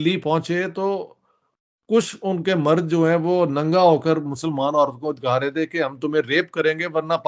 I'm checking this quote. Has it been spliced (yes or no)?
no